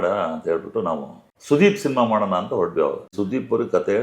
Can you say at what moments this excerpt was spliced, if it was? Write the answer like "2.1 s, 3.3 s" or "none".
3.0 s